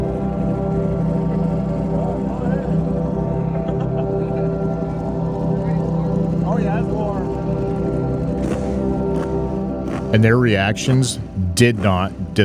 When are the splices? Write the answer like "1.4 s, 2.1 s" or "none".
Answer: none